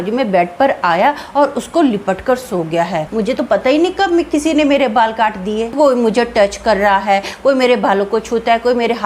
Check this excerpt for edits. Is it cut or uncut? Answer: cut